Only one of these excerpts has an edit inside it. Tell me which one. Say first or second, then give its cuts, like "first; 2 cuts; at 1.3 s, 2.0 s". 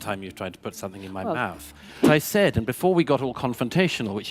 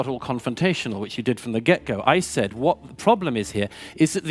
first; 1 cut; at 2.0 s